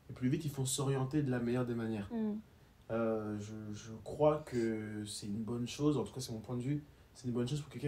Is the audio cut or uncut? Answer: uncut